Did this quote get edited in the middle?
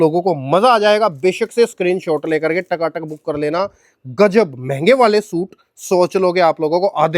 no; 0 cuts

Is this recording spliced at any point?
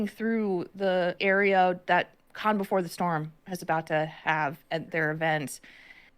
yes; 2 cuts; at 1.2 s, 4.9 s

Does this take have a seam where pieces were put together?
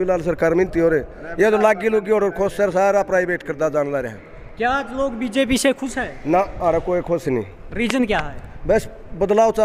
no; 0 cuts

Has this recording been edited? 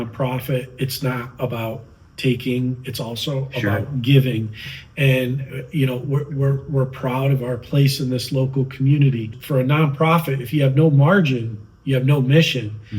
yes; 1 cut; at 9.4 s

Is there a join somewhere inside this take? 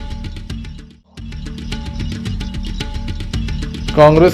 yes; 2 cuts; at 1.7 s, 3.5 s

